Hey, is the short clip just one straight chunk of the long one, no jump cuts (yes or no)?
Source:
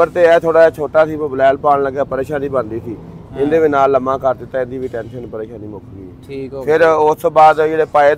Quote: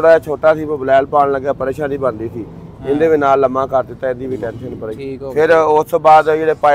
no